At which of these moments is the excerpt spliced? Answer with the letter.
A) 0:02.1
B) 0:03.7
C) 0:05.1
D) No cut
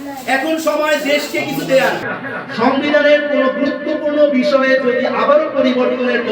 A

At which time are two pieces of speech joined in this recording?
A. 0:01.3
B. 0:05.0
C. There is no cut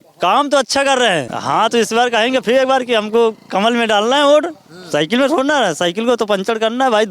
A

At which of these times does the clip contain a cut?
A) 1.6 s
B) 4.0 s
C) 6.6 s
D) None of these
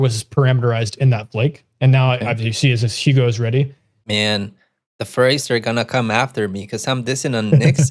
B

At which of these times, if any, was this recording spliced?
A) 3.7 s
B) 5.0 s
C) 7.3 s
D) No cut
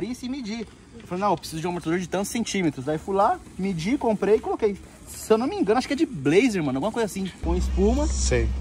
C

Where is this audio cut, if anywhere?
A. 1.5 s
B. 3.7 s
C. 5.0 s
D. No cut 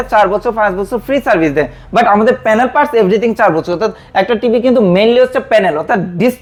D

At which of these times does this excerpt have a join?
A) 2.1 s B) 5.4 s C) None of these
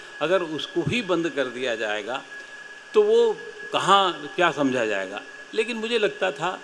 C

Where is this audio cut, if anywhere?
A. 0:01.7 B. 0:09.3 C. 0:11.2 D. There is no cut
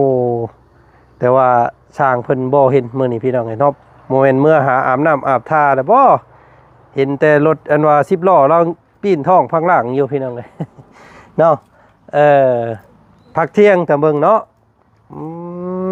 D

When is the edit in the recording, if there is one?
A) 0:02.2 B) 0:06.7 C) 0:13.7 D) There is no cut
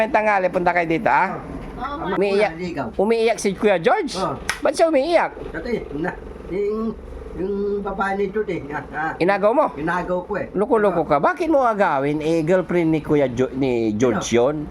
A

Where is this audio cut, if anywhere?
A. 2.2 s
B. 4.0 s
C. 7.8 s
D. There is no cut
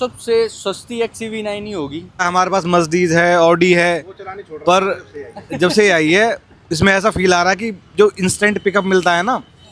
A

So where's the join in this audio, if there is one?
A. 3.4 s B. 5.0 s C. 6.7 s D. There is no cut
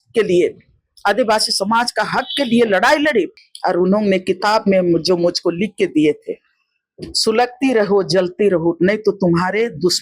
A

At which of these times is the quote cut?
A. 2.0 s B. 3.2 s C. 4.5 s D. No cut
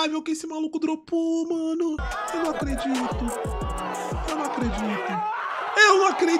D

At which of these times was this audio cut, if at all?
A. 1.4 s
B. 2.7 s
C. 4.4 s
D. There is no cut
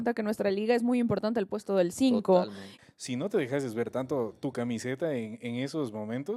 B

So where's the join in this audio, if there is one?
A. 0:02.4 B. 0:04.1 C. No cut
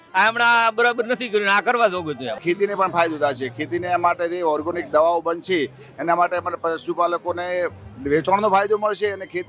A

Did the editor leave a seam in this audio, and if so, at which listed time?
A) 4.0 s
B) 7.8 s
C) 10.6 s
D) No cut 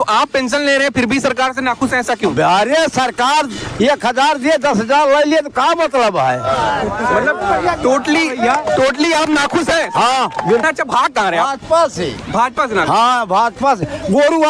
C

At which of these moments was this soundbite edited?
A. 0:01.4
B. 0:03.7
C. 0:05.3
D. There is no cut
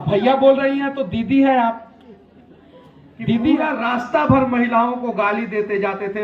B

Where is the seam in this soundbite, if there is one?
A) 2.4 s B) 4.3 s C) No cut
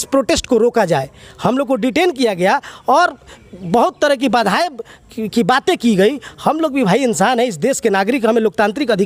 C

